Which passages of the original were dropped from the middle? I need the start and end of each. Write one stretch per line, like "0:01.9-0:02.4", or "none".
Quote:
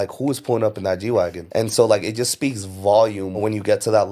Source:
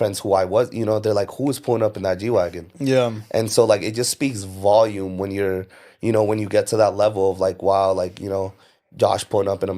0:02.6-0:03.2
0:05.2-0:06.2